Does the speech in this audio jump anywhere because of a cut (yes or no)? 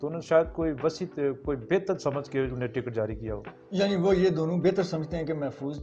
no